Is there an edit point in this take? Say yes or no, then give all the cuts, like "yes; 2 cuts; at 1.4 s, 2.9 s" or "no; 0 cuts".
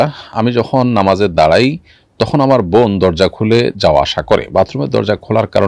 no; 0 cuts